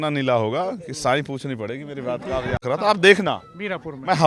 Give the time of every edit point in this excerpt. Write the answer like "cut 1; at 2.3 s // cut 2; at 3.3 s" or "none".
cut 1; at 2.6 s